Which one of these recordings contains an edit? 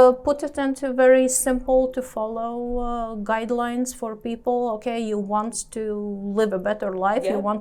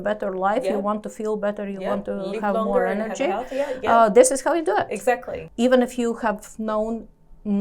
second; 1 cut; at 5.4 s

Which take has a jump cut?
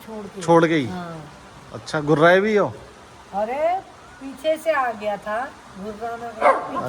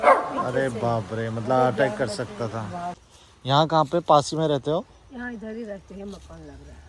second; 1 cut; at 3.0 s

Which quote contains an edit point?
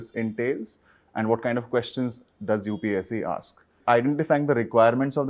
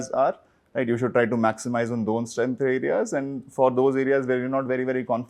first; 1 cut; at 3.8 s

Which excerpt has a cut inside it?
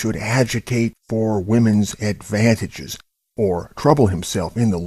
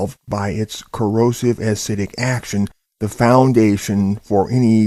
first; 1 cut; at 3.8 s

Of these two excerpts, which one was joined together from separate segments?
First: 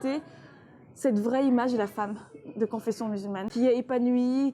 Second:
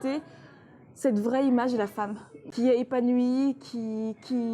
second; 1 cut; at 2.4 s

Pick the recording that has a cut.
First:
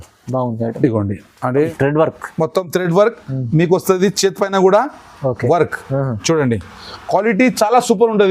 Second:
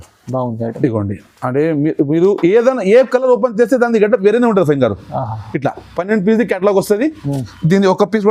first; 1 cut; at 1.7 s

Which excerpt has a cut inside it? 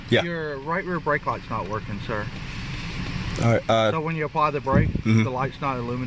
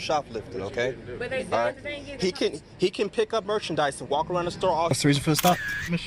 second; 1 cut; at 4.9 s

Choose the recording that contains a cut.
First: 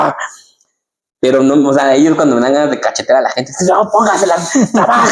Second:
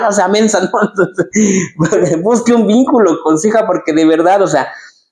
first; 1 cut; at 4.2 s

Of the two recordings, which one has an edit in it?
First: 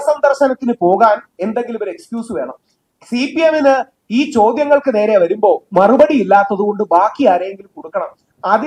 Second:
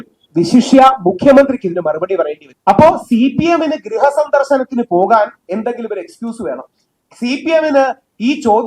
second; 1 cut; at 2.5 s

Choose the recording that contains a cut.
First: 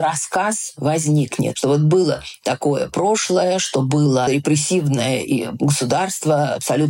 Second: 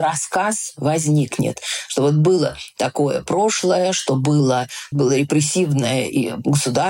first; 2 cuts; at 1.5 s, 4.3 s

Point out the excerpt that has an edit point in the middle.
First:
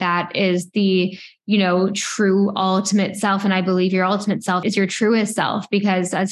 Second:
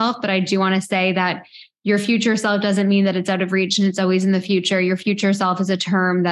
first; 1 cut; at 4.6 s

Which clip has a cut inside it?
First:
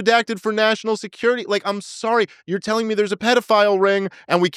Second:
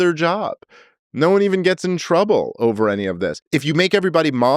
second; 1 cut; at 3.4 s

